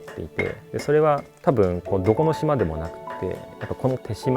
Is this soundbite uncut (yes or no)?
no